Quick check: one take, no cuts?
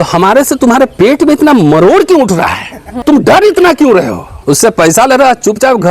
no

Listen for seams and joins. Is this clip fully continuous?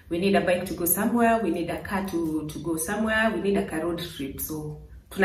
yes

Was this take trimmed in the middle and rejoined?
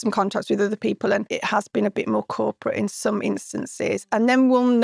yes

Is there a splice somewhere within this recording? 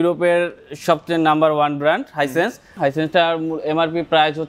yes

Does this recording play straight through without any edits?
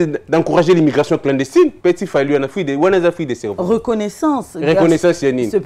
no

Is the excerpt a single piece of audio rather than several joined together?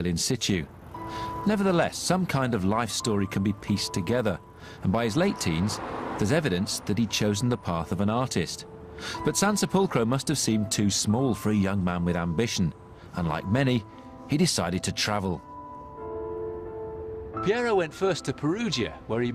yes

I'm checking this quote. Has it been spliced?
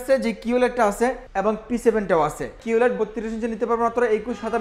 yes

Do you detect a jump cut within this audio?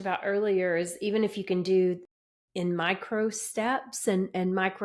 no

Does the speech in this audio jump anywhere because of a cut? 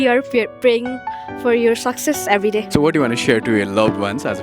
yes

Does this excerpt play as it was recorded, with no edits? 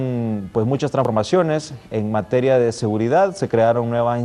no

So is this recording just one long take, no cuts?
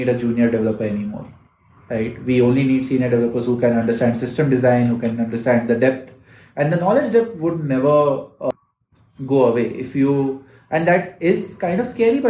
yes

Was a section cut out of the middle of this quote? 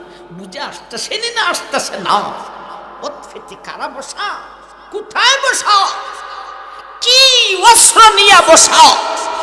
no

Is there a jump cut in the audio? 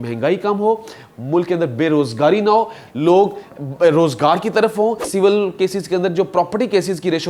yes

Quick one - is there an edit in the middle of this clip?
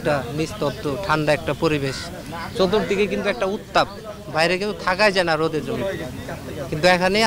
no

